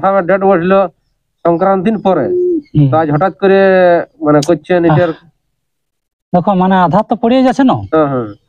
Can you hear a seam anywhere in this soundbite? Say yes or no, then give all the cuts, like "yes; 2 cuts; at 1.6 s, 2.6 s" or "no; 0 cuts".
no; 0 cuts